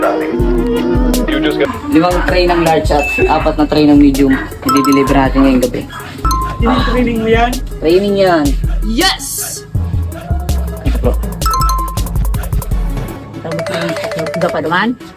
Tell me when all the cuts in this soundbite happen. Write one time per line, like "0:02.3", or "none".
0:01.6
0:06.3